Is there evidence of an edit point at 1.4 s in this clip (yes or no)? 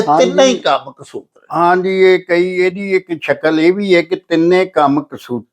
no